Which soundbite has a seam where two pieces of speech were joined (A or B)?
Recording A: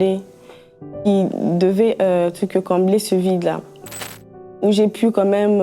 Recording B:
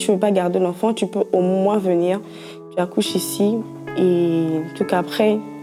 A